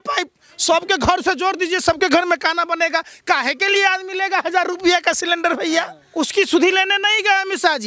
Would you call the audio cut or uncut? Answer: cut